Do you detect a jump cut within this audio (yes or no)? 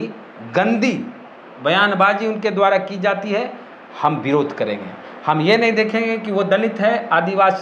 no